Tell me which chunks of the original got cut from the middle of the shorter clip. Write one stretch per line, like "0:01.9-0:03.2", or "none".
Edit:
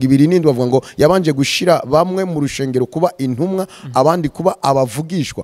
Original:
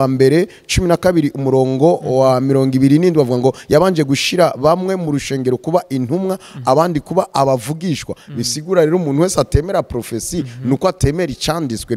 none